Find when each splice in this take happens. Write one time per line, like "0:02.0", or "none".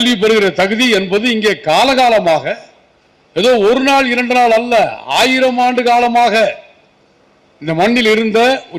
none